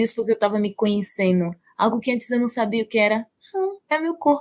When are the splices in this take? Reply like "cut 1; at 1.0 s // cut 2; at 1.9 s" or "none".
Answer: none